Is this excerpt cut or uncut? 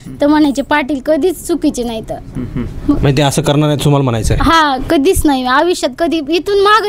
uncut